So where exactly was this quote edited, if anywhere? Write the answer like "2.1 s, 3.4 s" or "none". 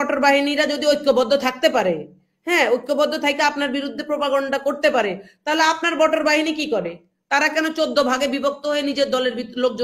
none